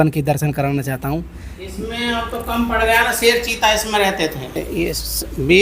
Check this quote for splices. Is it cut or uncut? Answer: cut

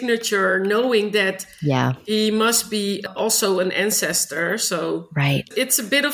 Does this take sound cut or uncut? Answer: uncut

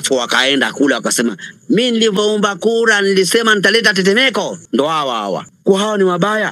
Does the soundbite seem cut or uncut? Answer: cut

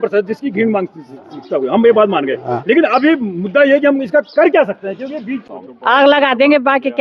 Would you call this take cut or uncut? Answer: cut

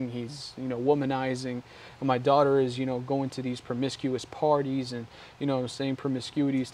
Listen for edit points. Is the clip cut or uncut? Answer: uncut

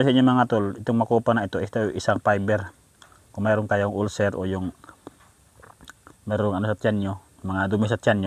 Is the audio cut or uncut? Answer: uncut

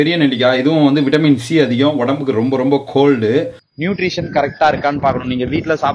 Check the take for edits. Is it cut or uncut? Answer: cut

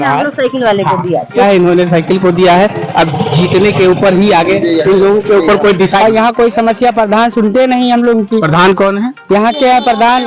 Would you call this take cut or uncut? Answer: uncut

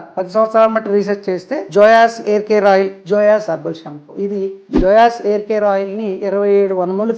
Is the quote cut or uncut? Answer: cut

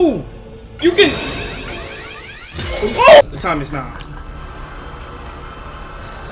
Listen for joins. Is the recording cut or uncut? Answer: cut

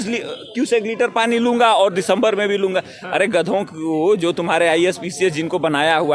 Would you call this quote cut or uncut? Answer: uncut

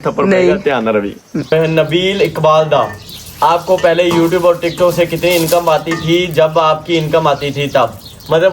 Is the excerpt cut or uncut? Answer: cut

